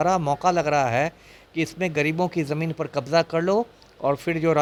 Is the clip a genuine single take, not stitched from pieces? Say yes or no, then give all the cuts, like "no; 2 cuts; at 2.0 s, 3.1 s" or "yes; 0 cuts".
yes; 0 cuts